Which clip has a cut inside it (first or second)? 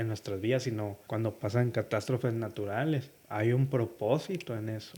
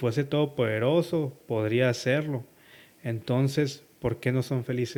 first